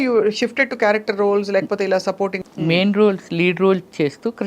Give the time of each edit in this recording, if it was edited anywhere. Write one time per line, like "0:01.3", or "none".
0:02.4